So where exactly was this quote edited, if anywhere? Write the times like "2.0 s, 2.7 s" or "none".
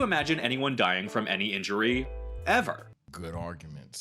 3.0 s